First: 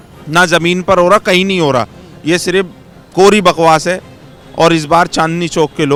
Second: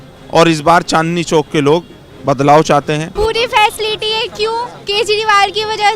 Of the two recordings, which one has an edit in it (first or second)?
second